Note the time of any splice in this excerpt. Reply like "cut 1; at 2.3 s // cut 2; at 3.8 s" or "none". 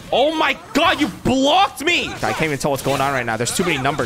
cut 1; at 2.1 s

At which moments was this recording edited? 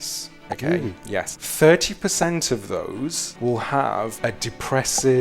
cut 1; at 1.4 s // cut 2; at 3.3 s // cut 3; at 4.1 s

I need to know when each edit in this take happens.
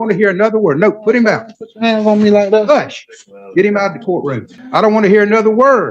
cut 1; at 4.5 s

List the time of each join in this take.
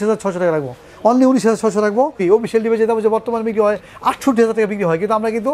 cut 1; at 2.2 s

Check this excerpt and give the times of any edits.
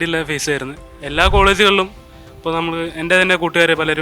cut 1; at 0.9 s

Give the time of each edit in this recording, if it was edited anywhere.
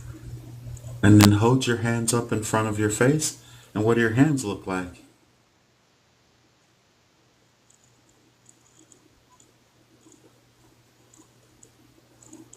cut 1; at 9.3 s

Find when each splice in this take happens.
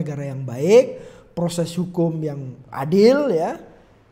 cut 1; at 2.6 s

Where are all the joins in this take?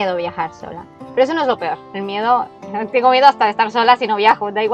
cut 1; at 2.6 s

